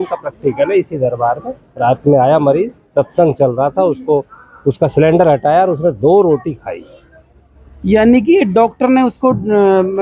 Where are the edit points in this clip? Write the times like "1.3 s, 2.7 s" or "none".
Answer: none